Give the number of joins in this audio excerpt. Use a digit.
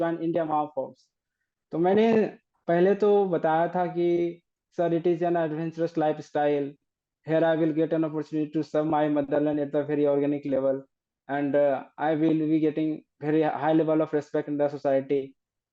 0